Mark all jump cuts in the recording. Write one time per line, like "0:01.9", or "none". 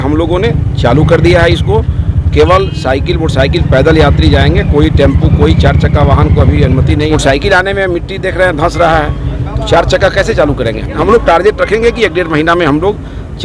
0:07.1
0:11.0